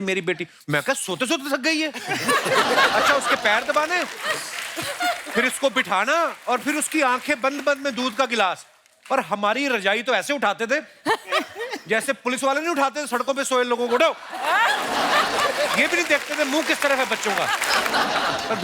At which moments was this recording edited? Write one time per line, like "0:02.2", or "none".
0:17.6